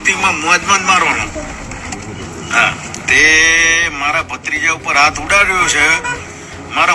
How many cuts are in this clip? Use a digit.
0